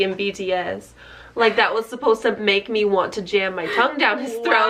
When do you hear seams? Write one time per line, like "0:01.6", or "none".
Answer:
none